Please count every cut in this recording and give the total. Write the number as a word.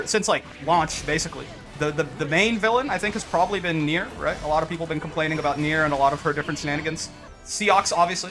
one